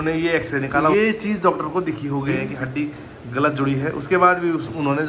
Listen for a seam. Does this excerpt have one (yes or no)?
yes